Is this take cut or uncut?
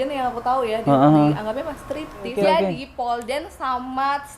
cut